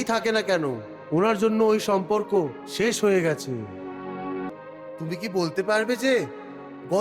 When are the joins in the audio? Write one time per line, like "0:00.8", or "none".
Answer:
0:04.5